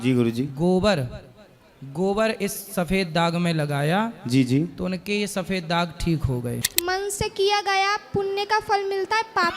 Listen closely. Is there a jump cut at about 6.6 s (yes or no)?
yes